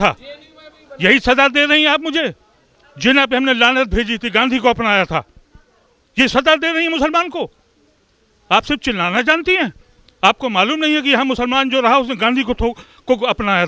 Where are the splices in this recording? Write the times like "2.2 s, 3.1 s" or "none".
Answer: none